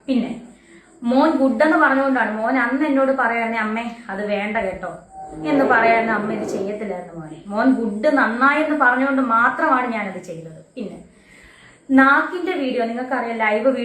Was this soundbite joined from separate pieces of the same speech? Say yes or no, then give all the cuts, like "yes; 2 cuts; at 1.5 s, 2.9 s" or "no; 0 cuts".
no; 0 cuts